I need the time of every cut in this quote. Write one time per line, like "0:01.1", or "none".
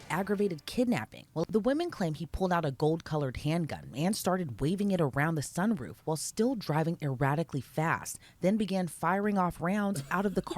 0:01.4